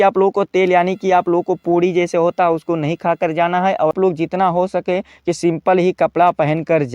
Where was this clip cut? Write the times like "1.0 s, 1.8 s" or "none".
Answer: 3.9 s